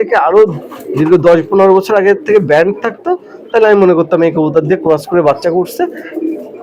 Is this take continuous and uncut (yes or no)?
yes